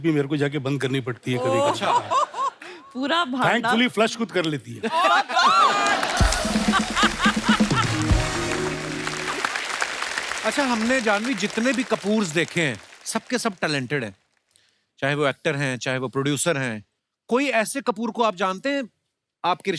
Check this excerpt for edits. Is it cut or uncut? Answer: cut